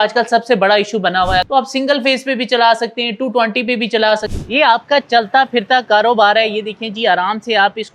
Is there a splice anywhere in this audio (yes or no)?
yes